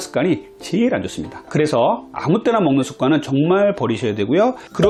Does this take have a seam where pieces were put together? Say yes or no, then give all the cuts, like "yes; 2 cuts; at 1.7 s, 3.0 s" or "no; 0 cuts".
no; 0 cuts